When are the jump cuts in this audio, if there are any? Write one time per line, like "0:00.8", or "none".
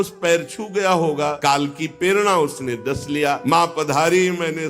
0:01.4
0:03.4